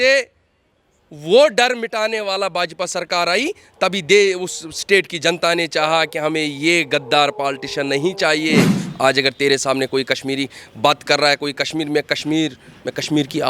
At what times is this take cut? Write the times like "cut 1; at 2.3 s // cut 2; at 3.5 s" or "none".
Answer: cut 1; at 8.8 s